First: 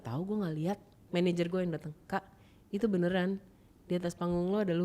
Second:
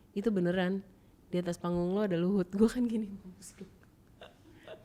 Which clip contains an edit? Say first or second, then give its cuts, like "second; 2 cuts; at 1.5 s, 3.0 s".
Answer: first; 1 cut; at 1.0 s